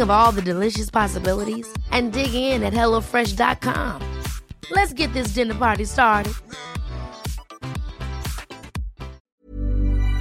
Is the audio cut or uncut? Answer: cut